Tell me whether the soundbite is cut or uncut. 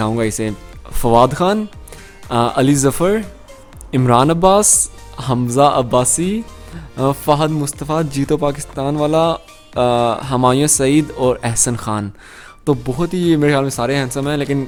uncut